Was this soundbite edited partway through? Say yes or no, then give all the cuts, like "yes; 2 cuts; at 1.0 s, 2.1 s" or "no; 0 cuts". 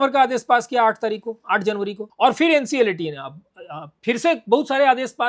yes; 1 cut; at 2.0 s